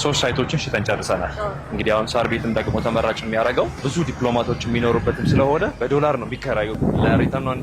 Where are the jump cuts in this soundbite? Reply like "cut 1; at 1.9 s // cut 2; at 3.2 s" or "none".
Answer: cut 1; at 3.8 s // cut 2; at 5.7 s // cut 3; at 6.7 s